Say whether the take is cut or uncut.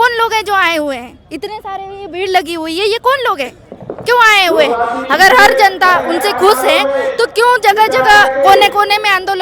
uncut